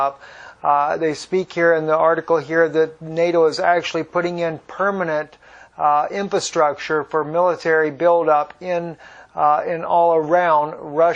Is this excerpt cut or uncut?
uncut